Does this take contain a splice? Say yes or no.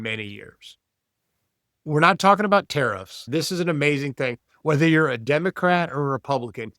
yes